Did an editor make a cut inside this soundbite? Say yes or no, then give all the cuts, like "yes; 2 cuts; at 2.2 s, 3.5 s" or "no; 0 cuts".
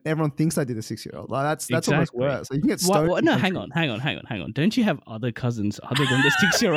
no; 0 cuts